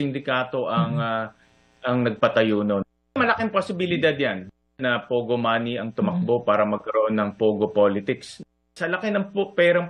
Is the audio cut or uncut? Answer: uncut